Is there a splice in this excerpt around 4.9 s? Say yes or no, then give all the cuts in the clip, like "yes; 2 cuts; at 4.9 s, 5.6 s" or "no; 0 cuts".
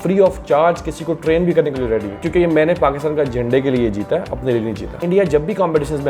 yes; 2 cuts; at 2.2 s, 4.9 s